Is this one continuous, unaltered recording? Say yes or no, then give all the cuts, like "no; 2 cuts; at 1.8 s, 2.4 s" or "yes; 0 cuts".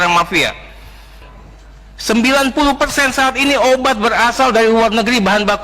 no; 1 cut; at 1.2 s